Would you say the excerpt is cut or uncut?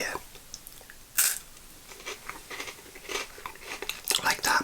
uncut